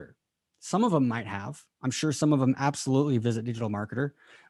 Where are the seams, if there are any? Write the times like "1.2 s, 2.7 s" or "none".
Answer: none